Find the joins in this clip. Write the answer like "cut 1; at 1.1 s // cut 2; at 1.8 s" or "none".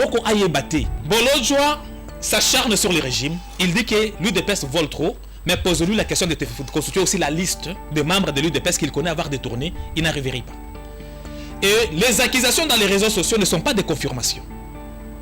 cut 1; at 0.9 s

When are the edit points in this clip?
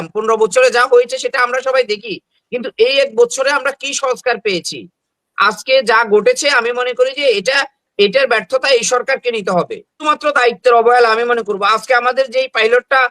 cut 1; at 10.0 s

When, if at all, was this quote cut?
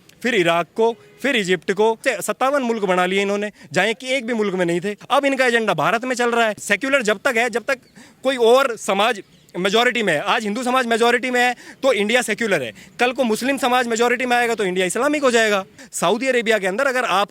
cut 1; at 2.0 s // cut 2; at 5.0 s // cut 3; at 6.7 s // cut 4; at 15.8 s

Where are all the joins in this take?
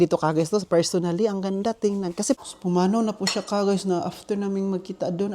cut 1; at 2.4 s

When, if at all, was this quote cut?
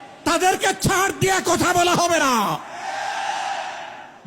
none

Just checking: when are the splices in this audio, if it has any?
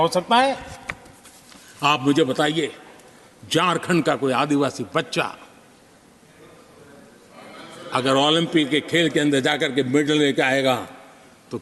none

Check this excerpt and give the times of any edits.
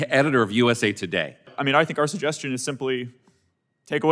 cut 1; at 1.5 s

